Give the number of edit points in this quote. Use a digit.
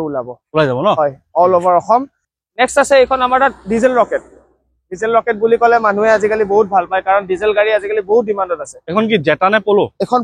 1